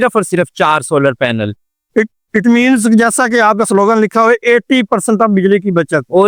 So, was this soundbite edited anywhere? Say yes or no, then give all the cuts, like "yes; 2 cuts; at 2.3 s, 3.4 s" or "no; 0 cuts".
no; 0 cuts